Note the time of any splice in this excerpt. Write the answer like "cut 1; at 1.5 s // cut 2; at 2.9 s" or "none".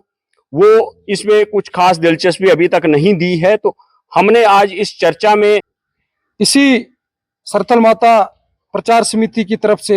cut 1; at 5.8 s